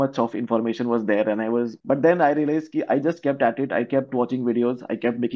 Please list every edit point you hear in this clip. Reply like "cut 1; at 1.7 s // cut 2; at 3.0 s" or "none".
cut 1; at 1.8 s